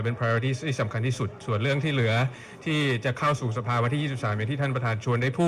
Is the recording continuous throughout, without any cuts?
yes; 0 cuts

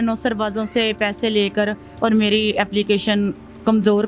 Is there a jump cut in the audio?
no; 0 cuts

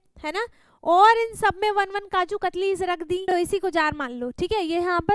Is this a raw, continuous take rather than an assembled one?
no; 1 cut; at 3.3 s

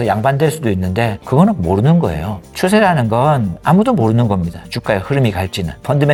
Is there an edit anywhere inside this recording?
no; 0 cuts

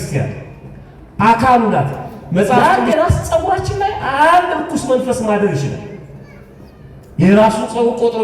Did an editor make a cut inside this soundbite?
yes; 1 cut; at 2.6 s

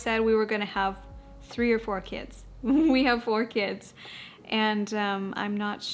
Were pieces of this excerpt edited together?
no; 0 cuts

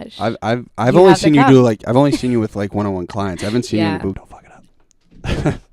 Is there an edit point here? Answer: yes; 1 cut; at 4.2 s

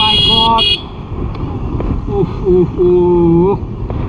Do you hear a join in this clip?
yes; 1 cut; at 1.0 s

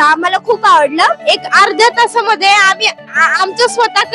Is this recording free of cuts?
no; 1 cut; at 1.2 s

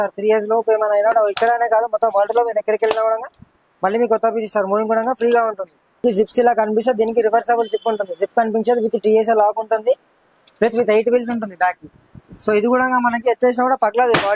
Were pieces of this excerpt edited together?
yes; 1 cut; at 6.0 s

